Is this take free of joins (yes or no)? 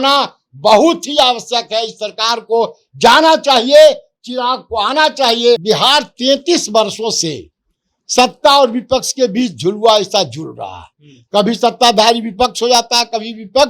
no